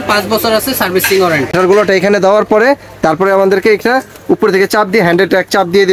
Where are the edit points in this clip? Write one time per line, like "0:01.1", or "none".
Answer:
0:01.5